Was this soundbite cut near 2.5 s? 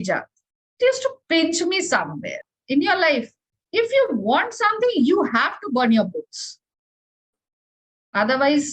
yes; 1 cut; at 2.5 s

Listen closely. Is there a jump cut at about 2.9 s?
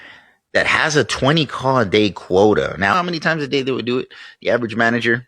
yes; 1 cut; at 2.9 s

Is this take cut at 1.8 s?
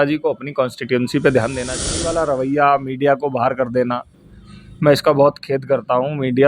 yes; 1 cut; at 1.8 s

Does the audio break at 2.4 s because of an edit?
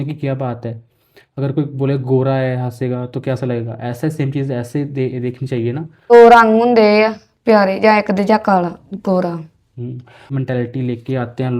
no; 2 cuts; at 6.1 s, 10.3 s

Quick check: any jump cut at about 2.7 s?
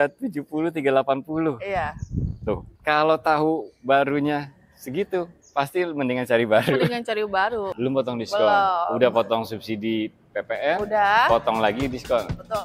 yes; 2 cuts; at 2.7 s, 7.7 s

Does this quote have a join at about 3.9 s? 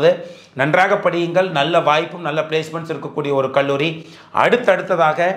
no; 0 cuts

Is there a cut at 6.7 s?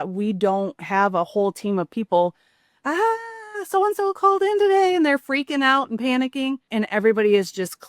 yes; 1 cut; at 6.7 s

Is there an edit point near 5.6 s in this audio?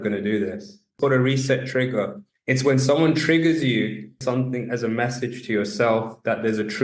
no; 3 cuts; at 0.9 s, 2.3 s, 4.2 s

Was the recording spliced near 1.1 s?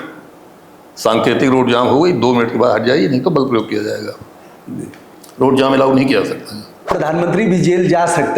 no; 1 cut; at 6.9 s

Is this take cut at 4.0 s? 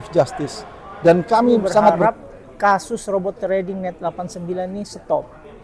no; 1 cut; at 2.0 s

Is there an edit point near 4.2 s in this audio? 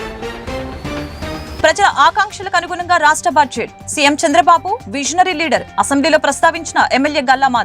no; 1 cut; at 1.5 s

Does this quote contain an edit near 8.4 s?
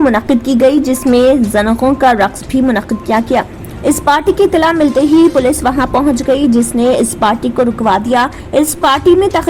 yes; 1 cut; at 8.4 s

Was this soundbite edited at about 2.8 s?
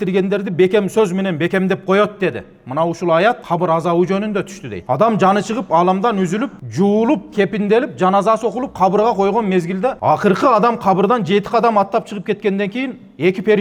no; 0 cuts

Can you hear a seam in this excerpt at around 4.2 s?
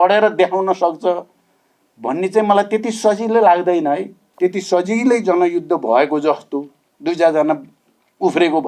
yes; 1 cut; at 4.2 s

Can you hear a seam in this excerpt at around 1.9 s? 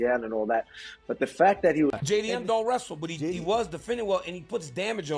yes; 1 cut; at 1.9 s

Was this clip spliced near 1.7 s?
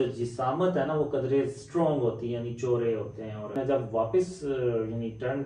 no; 1 cut; at 3.6 s

